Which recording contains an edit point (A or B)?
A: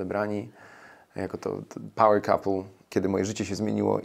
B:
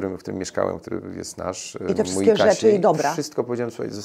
A